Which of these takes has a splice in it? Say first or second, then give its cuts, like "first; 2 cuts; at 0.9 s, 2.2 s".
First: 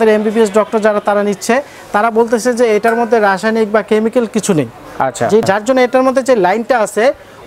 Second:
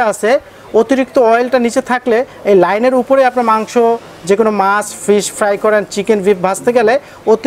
first; 1 cut; at 5.4 s